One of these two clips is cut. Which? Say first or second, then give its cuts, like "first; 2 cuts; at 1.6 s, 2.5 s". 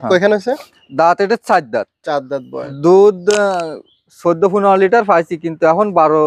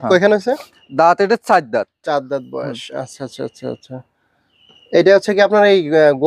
first; 1 cut; at 2.7 s